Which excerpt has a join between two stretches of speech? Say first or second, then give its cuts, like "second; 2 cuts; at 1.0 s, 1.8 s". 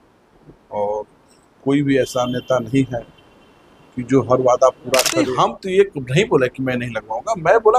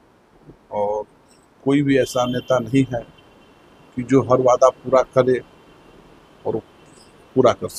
first; 1 cut; at 5.3 s